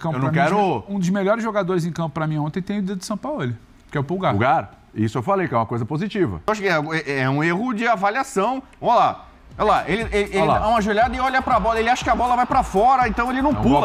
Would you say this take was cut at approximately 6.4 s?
yes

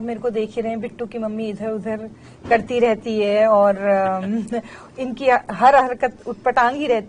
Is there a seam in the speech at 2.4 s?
no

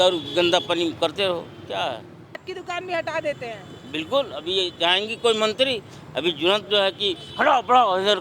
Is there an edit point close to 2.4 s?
yes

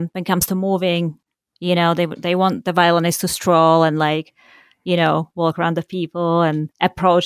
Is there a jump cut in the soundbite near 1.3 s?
yes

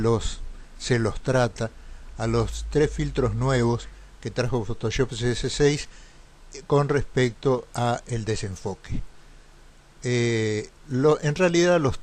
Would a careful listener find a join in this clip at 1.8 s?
no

